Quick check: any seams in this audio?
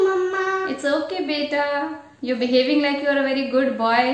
no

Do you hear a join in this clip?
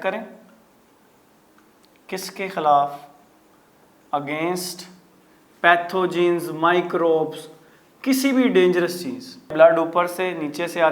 yes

